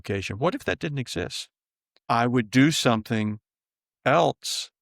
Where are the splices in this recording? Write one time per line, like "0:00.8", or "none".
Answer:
0:02.0